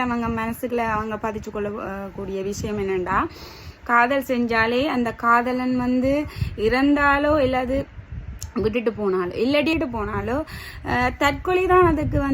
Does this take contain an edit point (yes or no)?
yes